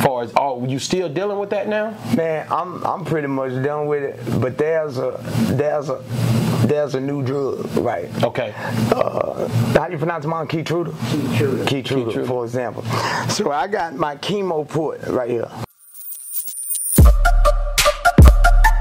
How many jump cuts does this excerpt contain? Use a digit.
1